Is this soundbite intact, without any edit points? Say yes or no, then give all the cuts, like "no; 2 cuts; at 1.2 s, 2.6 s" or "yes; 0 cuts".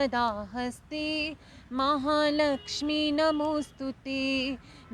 yes; 0 cuts